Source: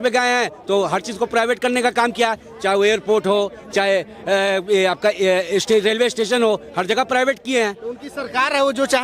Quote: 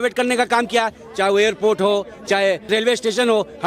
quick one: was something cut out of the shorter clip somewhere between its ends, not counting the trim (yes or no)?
yes